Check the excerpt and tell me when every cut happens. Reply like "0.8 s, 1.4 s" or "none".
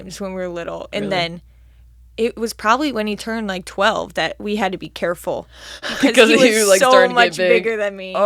none